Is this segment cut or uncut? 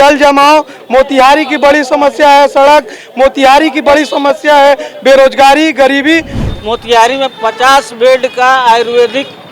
cut